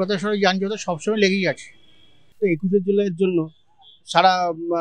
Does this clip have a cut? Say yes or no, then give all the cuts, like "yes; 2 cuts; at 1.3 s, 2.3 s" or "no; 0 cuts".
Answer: yes; 1 cut; at 2.4 s